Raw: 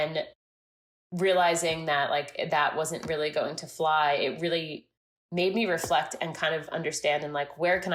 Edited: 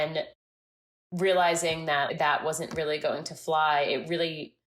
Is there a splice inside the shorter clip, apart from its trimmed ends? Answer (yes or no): yes